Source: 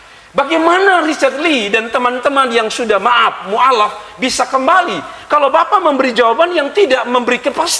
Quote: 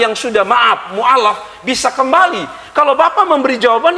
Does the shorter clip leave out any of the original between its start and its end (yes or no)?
no